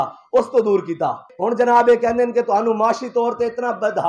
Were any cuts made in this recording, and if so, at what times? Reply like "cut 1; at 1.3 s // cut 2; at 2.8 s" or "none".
cut 1; at 1.3 s